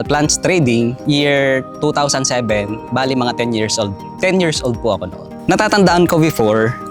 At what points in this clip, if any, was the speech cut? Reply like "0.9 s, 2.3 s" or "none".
5.3 s